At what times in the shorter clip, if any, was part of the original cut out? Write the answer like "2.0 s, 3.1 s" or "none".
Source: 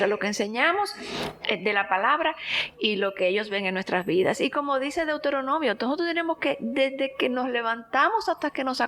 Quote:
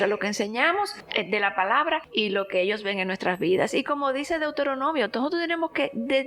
1.0 s, 2.1 s